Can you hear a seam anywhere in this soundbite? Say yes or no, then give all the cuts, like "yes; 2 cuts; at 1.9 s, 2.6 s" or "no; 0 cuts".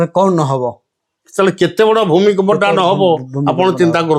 no; 0 cuts